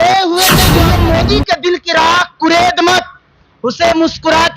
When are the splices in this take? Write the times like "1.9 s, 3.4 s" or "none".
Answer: 0.9 s